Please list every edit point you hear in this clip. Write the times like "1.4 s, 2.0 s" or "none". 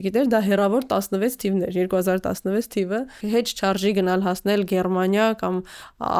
3.2 s